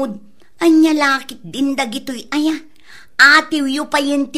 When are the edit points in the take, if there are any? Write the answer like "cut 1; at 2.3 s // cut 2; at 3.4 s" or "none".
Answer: none